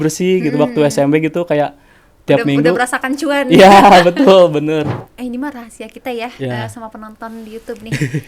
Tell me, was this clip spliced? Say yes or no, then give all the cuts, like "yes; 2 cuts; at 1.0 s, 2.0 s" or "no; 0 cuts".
yes; 1 cut; at 5.0 s